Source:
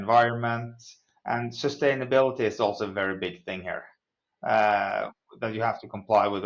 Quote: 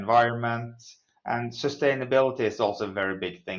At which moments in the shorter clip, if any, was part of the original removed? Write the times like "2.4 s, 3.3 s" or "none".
none